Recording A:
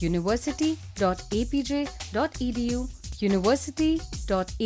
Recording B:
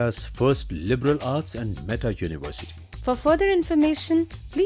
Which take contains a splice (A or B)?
A